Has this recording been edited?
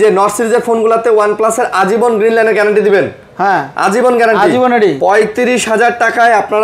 yes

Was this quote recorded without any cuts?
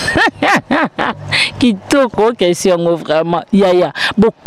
yes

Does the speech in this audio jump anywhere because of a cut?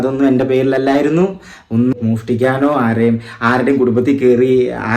yes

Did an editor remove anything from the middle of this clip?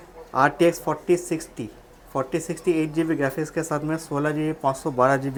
no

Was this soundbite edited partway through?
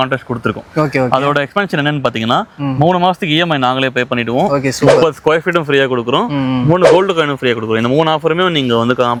no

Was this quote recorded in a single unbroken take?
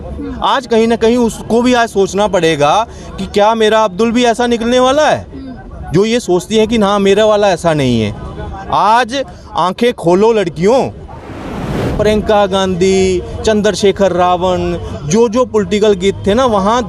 no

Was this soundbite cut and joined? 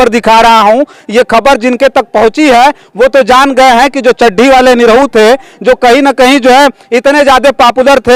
no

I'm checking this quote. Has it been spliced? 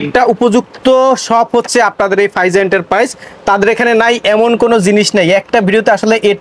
no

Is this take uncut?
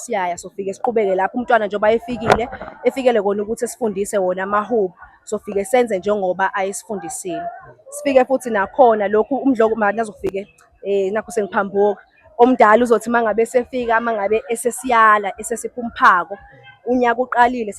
yes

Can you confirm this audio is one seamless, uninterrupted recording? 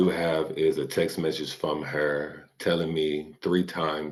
yes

